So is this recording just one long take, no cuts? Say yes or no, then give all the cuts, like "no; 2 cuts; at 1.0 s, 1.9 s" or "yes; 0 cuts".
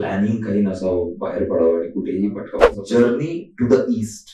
no; 1 cut; at 2.6 s